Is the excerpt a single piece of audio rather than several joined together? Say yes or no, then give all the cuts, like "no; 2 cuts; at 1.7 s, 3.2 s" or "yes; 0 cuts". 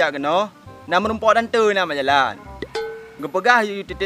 yes; 0 cuts